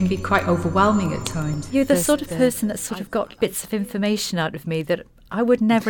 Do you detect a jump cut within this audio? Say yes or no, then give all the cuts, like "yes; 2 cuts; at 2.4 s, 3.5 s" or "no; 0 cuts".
yes; 1 cut; at 1.7 s